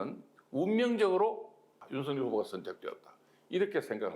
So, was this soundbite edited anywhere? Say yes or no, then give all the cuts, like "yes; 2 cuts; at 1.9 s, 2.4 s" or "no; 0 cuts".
yes; 1 cut; at 1.8 s